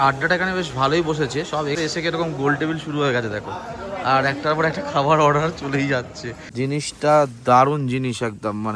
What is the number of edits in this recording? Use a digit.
2